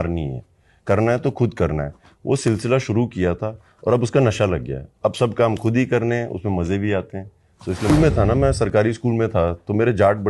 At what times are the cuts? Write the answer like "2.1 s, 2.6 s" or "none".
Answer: 7.9 s